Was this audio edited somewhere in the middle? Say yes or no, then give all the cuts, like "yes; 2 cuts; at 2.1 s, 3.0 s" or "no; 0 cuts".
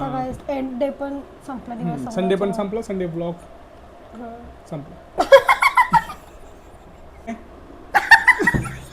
yes; 1 cut; at 7.3 s